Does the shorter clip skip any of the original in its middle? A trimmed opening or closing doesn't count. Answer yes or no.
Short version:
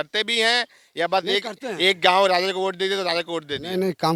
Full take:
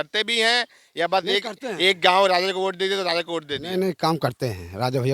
no